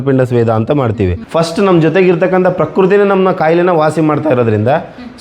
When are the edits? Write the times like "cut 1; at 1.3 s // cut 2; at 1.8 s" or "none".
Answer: cut 1; at 1.2 s